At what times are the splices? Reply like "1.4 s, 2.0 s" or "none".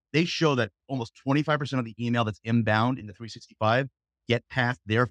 none